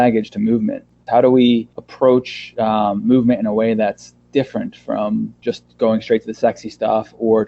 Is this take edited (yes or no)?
yes